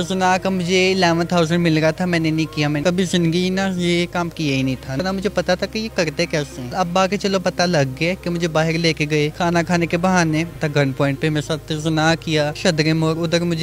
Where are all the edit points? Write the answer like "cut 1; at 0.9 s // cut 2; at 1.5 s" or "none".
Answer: cut 1; at 2.8 s // cut 2; at 5.0 s // cut 3; at 6.7 s // cut 4; at 8.2 s // cut 5; at 9.3 s // cut 6; at 10.6 s // cut 7; at 12.6 s